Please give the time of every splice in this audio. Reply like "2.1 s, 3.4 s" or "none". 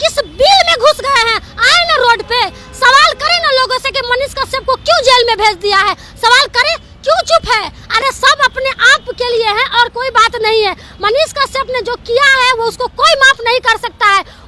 none